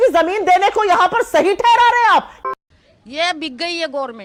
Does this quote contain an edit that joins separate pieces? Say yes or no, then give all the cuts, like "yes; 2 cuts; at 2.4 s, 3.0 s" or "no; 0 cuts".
no; 0 cuts